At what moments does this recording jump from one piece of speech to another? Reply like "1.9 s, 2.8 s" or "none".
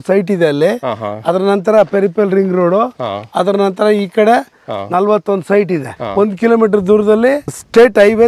6.0 s